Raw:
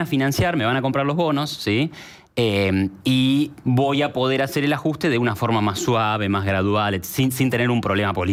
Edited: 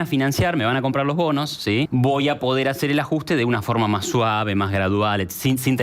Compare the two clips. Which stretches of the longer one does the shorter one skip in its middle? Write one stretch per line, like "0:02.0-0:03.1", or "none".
0:01.9-0:03.6